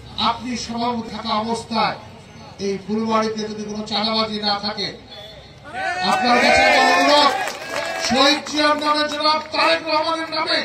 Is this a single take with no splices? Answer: no; 1 cut; at 1.1 s

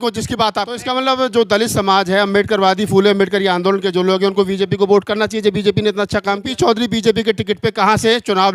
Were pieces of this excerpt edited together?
yes; 2 cuts; at 0.9 s, 6.5 s

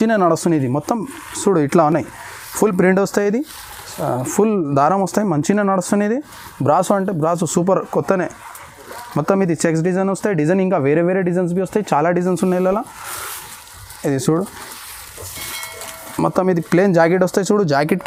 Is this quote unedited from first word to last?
yes; 0 cuts

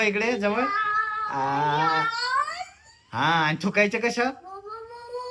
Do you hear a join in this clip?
no; 0 cuts

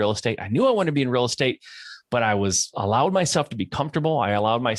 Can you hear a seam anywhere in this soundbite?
no; 0 cuts

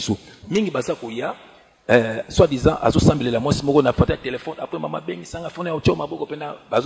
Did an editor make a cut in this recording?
no; 0 cuts

